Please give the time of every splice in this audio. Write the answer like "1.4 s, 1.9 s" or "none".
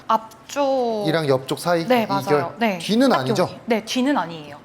none